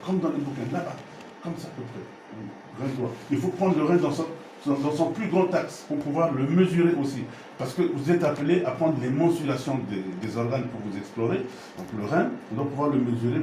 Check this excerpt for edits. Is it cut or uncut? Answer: uncut